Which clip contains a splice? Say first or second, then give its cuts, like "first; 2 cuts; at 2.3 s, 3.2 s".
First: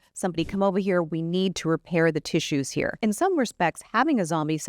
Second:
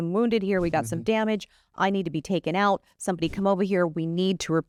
first; 1 cut; at 2.9 s